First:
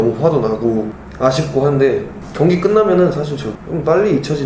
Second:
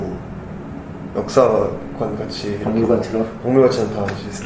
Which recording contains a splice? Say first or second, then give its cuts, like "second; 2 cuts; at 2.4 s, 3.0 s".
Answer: first; 3 cuts; at 1.0 s, 2.2 s, 3.4 s